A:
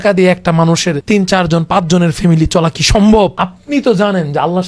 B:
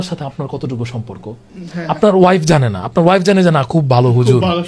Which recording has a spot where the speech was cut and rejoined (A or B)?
A